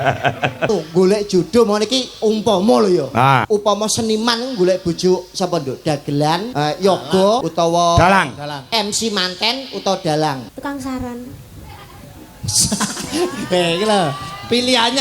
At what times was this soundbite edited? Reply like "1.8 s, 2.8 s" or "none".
0.7 s, 3.4 s, 6.5 s, 7.5 s, 10.5 s